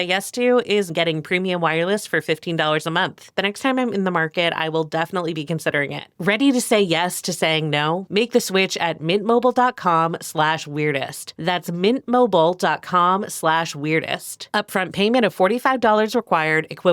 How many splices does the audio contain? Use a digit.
3